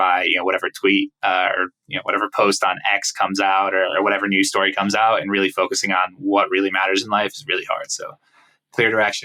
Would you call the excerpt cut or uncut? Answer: uncut